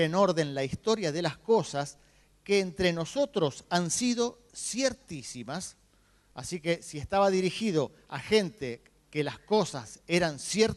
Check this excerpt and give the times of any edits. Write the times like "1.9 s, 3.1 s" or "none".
5.2 s